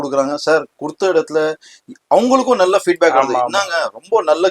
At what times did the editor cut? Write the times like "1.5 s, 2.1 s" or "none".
none